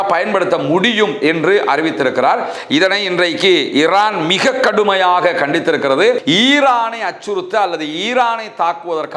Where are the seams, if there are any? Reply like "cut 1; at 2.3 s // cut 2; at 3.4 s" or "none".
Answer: cut 1; at 6.2 s